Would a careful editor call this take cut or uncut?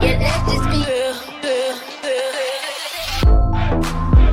uncut